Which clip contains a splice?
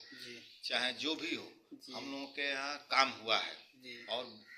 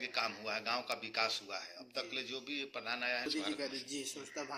second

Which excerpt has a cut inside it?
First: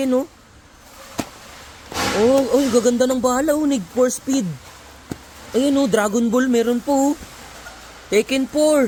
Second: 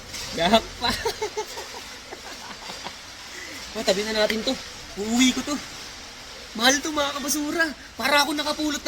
second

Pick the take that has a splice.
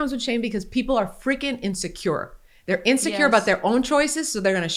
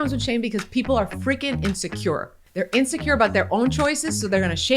second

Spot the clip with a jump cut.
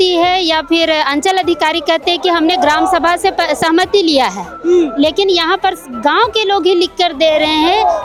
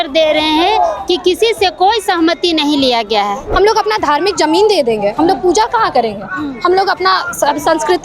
second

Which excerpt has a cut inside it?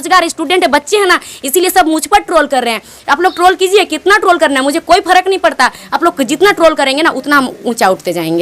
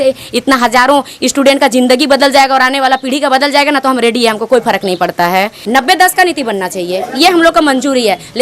second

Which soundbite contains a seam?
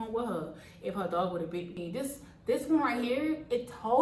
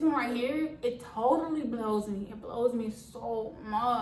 first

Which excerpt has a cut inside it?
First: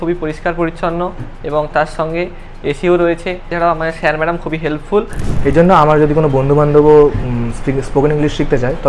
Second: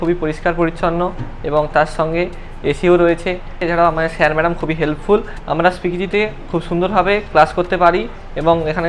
first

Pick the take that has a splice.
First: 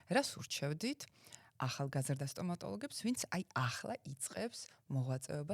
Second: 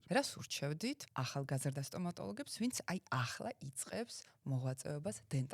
second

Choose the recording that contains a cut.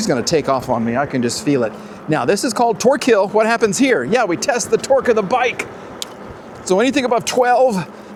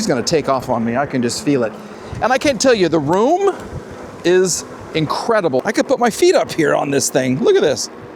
second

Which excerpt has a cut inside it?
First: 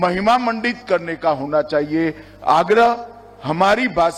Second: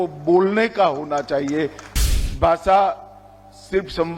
second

